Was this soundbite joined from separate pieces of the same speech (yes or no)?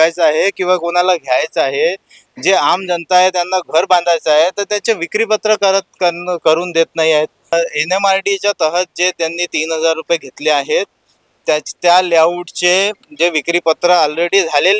yes